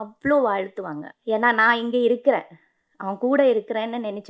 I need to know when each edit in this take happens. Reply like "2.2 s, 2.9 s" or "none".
1.0 s